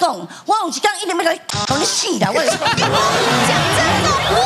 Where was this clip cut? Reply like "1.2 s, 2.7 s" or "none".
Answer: none